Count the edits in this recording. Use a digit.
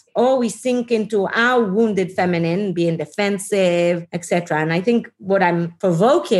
2